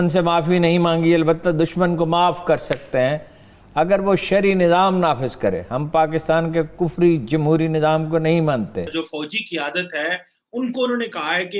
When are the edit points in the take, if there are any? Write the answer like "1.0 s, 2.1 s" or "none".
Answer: 8.9 s